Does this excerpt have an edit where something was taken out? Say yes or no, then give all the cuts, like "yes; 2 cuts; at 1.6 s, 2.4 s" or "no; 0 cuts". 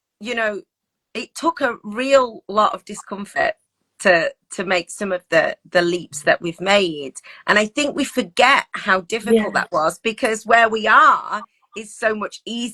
no; 0 cuts